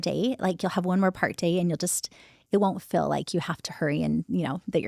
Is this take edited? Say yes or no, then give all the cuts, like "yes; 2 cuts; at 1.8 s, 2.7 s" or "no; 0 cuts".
no; 0 cuts